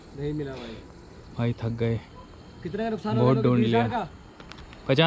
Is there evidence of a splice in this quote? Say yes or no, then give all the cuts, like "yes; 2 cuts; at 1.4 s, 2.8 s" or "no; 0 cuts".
no; 0 cuts